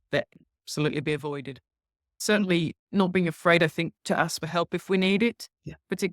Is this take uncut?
no; 1 cut; at 2.2 s

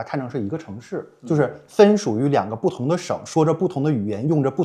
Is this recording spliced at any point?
no; 0 cuts

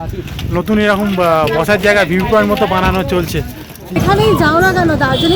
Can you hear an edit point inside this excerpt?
yes; 1 cut; at 4.0 s

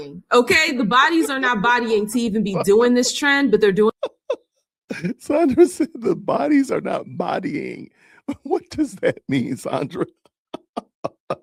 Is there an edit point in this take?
no; 0 cuts

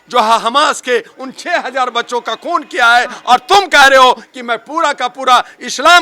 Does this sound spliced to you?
no; 0 cuts

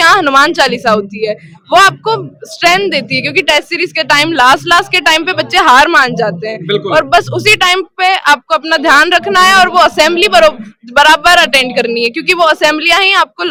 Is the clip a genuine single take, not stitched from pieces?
yes; 0 cuts

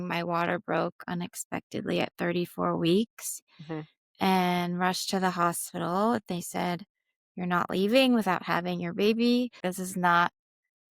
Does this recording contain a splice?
yes; 1 cut; at 9.6 s

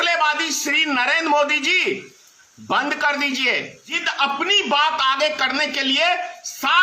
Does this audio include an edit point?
yes; 1 cut; at 4.0 s

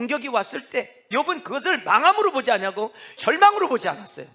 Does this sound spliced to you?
yes; 2 cuts; at 1.1 s, 3.2 s

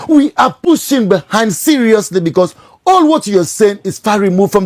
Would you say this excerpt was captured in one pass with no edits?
yes; 0 cuts

